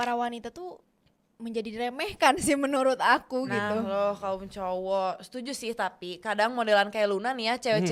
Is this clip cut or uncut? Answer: uncut